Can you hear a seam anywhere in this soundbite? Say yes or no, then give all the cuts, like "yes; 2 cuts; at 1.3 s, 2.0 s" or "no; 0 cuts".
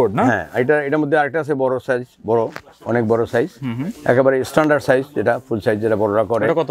no; 0 cuts